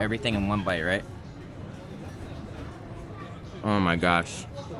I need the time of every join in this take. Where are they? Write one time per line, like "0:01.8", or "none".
none